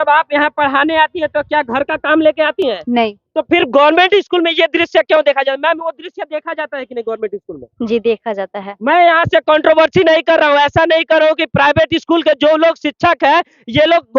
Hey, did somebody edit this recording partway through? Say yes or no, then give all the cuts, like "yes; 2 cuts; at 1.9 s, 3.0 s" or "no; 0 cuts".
no; 0 cuts